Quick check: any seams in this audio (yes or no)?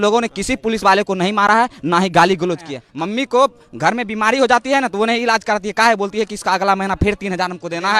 yes